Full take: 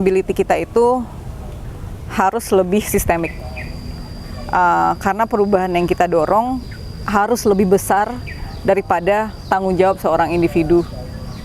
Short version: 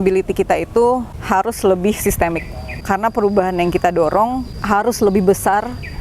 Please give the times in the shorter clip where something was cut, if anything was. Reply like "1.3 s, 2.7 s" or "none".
1.1 s, 2.8 s, 4.5 s